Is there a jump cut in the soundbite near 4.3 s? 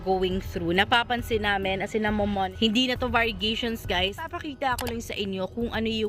yes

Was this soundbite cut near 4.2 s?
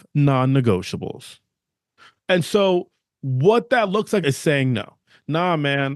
yes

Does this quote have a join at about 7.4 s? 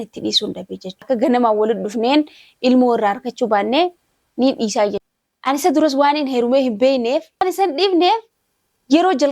yes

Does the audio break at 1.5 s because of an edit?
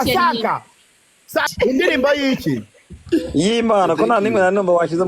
yes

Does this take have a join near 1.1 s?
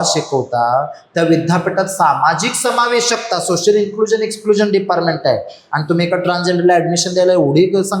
no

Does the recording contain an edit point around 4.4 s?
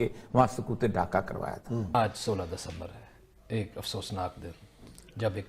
no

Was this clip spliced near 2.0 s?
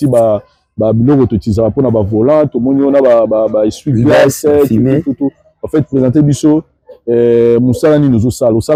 no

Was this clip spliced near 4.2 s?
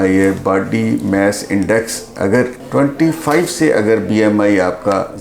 no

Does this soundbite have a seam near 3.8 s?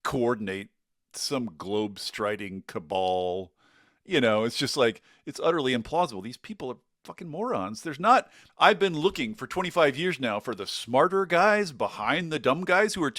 no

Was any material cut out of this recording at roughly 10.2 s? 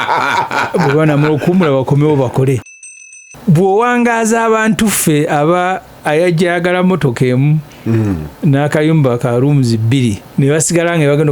yes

